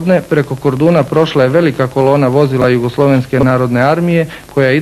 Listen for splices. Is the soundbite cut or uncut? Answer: cut